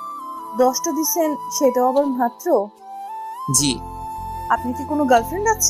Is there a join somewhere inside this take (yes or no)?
yes